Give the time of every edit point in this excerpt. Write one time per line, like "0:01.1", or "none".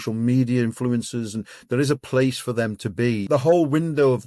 0:03.2